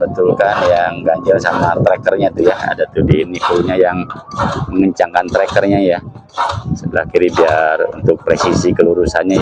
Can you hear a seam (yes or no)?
no